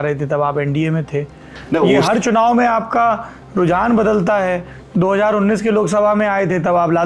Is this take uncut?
yes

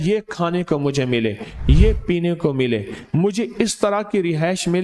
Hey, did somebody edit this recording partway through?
no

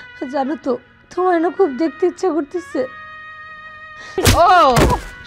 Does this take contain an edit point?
yes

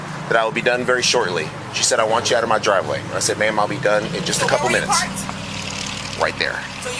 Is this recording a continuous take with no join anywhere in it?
yes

